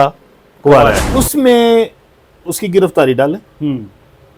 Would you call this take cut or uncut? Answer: cut